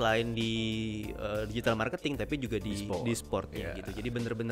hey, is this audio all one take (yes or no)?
yes